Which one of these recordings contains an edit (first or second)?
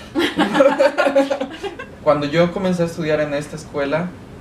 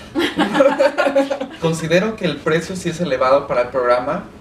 first